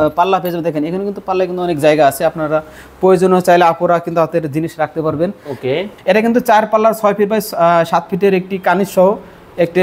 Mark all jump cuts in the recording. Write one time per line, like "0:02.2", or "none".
0:05.9